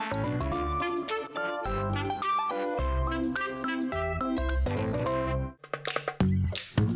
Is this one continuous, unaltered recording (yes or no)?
no